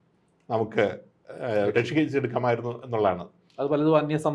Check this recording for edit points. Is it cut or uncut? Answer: uncut